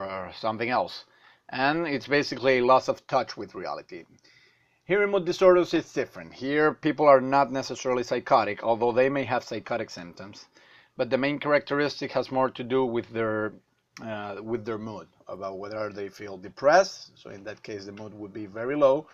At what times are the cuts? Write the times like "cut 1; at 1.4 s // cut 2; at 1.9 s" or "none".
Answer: none